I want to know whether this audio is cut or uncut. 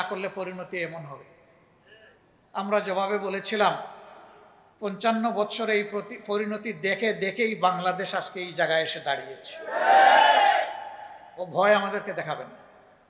uncut